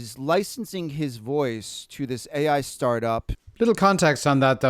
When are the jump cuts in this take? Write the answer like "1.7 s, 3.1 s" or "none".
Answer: 3.4 s